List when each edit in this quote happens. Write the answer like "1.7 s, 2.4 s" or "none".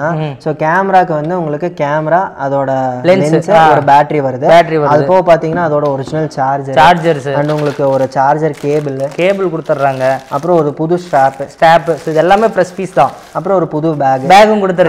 none

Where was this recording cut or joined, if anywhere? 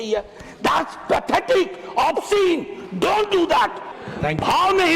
3.9 s

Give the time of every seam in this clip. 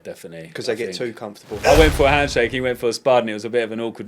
1.5 s

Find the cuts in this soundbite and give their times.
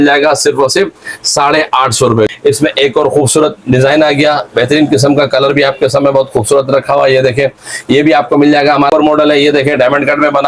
2.3 s, 8.9 s

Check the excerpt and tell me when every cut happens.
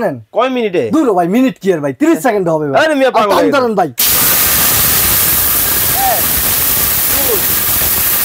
4.0 s

